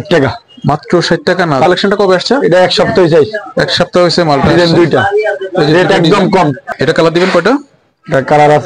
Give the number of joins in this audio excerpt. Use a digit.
2